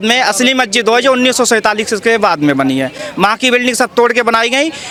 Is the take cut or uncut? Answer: uncut